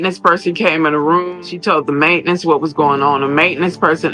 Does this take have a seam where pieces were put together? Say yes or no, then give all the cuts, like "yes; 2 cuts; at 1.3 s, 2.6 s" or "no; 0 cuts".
yes; 1 cut; at 1.4 s